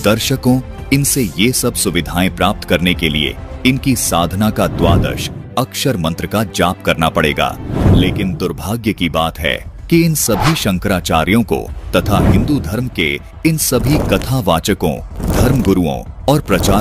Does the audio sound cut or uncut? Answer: uncut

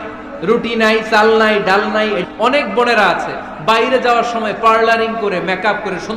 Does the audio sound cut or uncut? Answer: cut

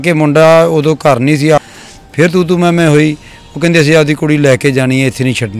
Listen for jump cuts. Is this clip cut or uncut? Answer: cut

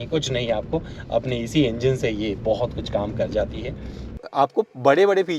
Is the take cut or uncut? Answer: cut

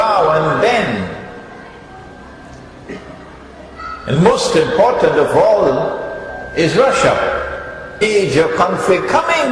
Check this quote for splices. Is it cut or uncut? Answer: uncut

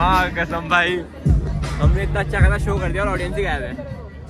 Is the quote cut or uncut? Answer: uncut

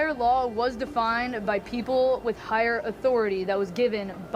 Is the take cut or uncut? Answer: uncut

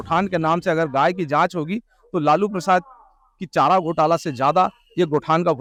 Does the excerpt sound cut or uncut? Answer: uncut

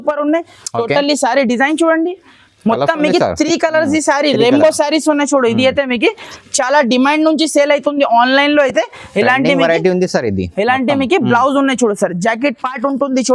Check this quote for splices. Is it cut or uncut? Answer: uncut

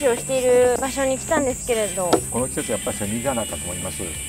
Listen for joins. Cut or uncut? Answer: cut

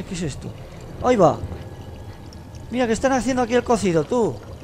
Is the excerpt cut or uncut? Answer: uncut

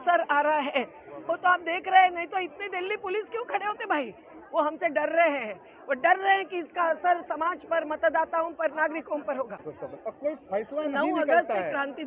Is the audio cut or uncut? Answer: cut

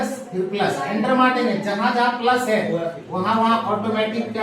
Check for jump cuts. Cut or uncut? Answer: uncut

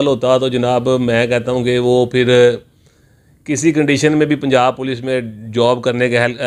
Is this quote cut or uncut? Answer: uncut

